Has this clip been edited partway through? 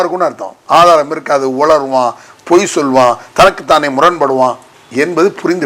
yes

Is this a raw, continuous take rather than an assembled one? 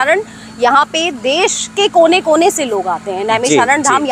yes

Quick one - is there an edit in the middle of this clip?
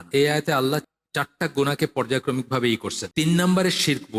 yes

